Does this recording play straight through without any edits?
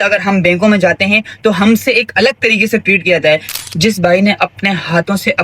no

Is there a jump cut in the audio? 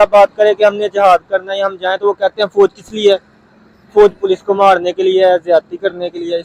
no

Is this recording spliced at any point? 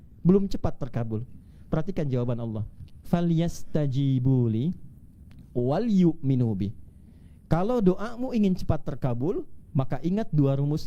no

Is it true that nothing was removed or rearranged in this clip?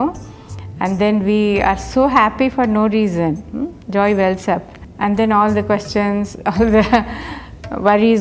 yes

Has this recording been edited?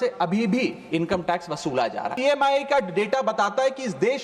yes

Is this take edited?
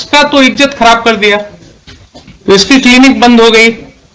yes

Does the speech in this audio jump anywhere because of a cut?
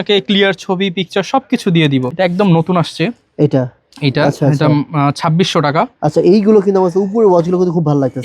yes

